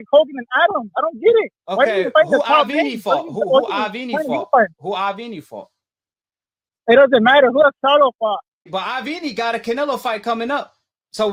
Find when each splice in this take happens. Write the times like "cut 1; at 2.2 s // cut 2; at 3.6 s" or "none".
none